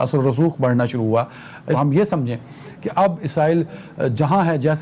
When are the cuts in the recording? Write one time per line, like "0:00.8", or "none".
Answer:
0:01.8